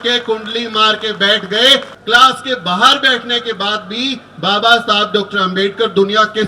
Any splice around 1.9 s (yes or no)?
yes